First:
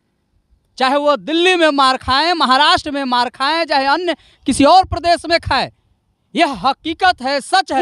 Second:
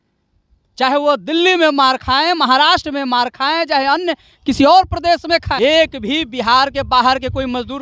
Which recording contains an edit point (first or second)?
second